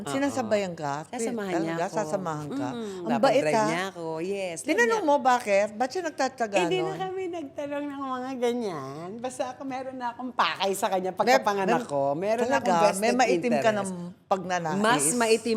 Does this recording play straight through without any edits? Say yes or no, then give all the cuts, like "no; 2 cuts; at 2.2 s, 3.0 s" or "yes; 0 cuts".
yes; 0 cuts